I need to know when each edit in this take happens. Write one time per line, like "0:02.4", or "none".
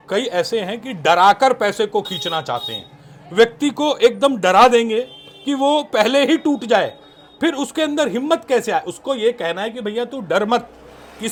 none